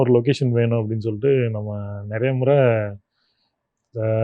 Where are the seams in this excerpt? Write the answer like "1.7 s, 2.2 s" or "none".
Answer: none